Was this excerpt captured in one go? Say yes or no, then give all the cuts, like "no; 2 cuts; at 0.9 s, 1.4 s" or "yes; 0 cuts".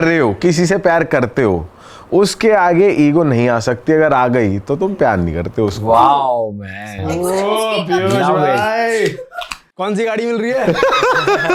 yes; 0 cuts